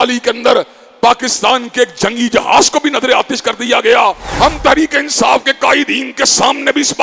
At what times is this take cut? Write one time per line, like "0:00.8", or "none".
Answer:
0:04.2

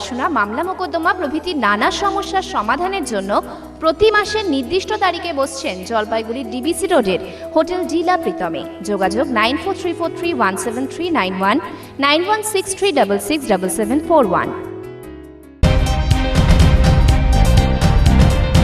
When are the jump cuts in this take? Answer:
0:15.6

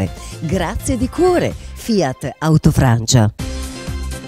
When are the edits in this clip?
0:03.3

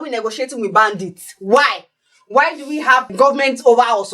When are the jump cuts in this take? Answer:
0:03.1

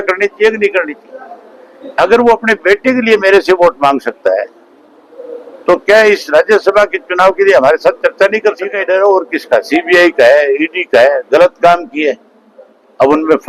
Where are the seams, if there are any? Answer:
0:08.8

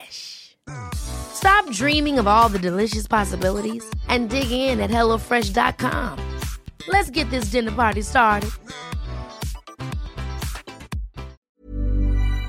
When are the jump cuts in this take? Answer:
0:11.4

